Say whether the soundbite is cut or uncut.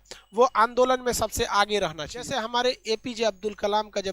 cut